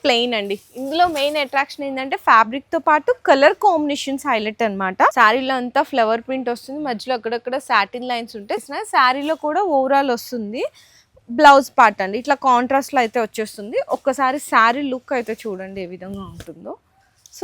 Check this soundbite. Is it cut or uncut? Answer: cut